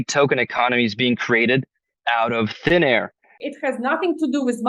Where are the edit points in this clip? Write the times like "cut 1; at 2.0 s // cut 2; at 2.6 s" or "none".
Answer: cut 1; at 3.4 s